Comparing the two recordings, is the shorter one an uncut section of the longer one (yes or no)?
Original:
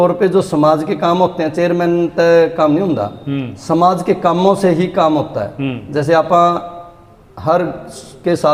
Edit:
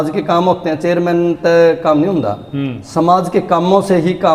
yes